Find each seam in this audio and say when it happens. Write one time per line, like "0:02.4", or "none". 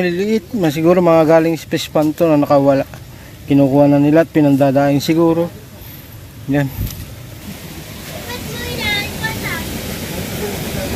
0:07.3